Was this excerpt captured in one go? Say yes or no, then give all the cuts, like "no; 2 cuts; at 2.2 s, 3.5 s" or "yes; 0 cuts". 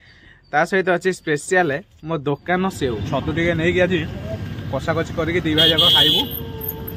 no; 1 cut; at 3.0 s